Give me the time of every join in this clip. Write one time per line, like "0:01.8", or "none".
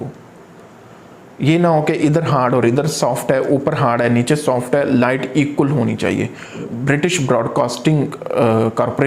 0:06.7